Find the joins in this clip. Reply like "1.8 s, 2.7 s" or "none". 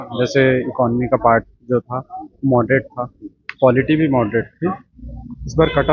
none

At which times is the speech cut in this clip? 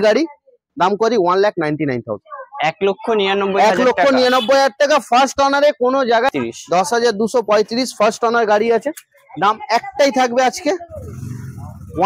6.3 s

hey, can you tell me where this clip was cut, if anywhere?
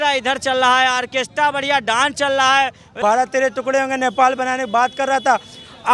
3.0 s

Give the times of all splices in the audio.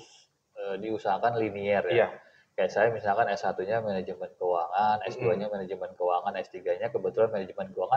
none

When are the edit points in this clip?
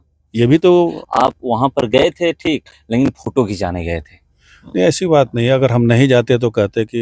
1.0 s

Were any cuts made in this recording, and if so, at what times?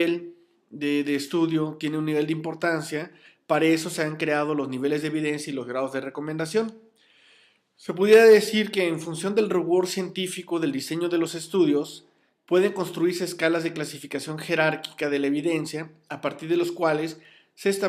none

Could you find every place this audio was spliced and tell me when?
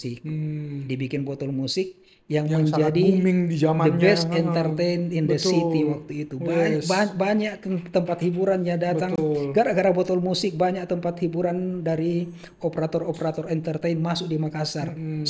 none

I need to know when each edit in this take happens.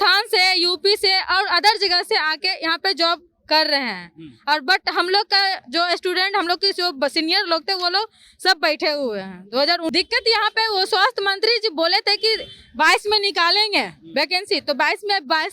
9.9 s

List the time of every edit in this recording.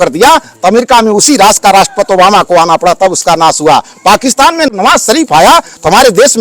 4.7 s

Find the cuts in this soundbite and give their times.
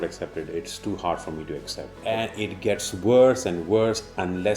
1.9 s

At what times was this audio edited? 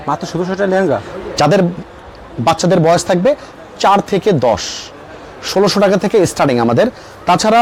none

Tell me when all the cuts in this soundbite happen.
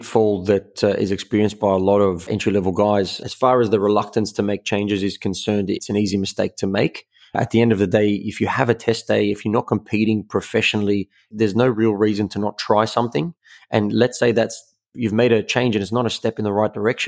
3.2 s

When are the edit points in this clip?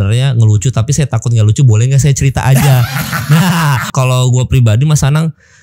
3.9 s

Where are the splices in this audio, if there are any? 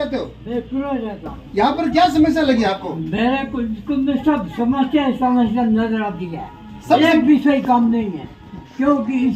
1.3 s

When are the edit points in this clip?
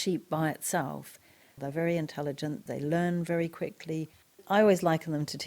1.6 s, 2.6 s, 4.3 s

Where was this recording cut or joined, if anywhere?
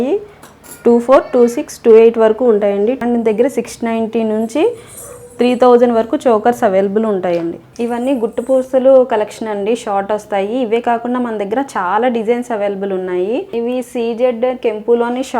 3.0 s, 7.6 s, 13.5 s

